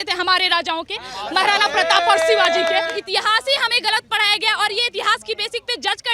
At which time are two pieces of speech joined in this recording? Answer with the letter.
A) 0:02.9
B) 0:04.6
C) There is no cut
A